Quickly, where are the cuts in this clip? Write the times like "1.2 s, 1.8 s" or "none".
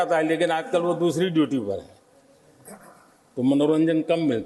none

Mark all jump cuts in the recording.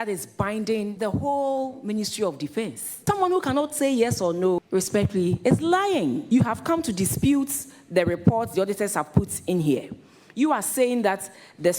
0.9 s, 2.8 s, 4.6 s, 6.2 s

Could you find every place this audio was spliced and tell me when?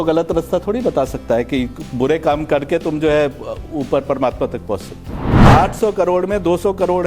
5.3 s

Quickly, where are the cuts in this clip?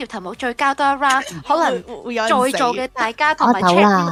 none

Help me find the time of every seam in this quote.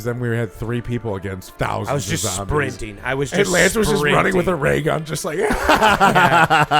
1.4 s

